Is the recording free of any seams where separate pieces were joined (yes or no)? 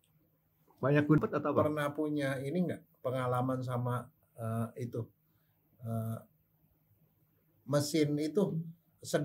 no